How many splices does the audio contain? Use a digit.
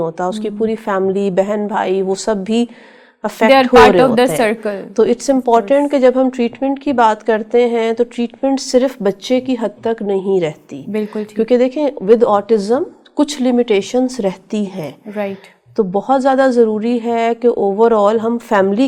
0